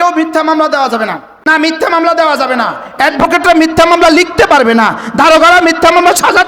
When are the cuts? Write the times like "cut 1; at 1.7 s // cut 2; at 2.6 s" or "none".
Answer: cut 1; at 1.5 s